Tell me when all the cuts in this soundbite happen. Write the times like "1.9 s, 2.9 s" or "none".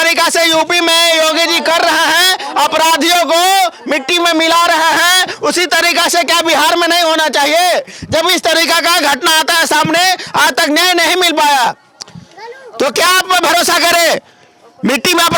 none